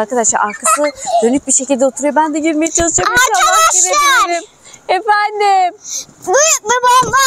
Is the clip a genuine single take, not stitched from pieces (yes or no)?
yes